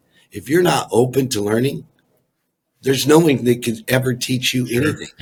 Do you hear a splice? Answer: no; 0 cuts

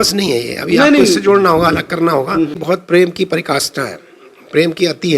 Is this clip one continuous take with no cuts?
no; 1 cut; at 2.6 s

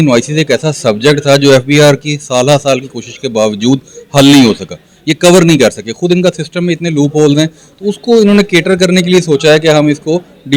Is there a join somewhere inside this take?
no; 0 cuts

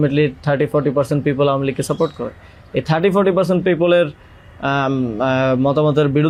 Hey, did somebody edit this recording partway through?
no; 0 cuts

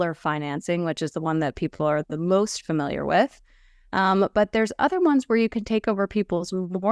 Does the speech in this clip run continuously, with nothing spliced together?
yes; 0 cuts

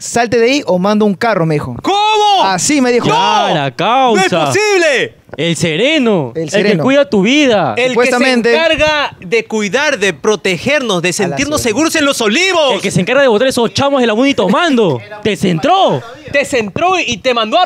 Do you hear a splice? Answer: no; 0 cuts

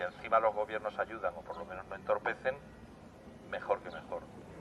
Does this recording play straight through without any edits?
no; 1 cut; at 1.1 s

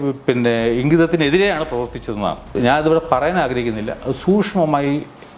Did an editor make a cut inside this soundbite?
yes; 1 cut; at 2.6 s

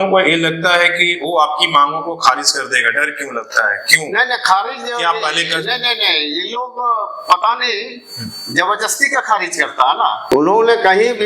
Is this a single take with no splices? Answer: no; 1 cut; at 10.2 s

